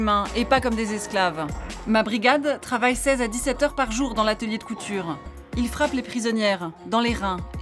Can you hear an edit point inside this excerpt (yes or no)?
yes